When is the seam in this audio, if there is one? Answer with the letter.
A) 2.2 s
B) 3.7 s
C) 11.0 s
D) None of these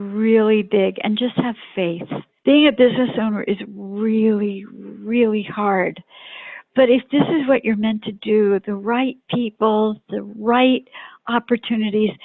A